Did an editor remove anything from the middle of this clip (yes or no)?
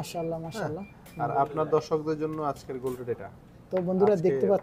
no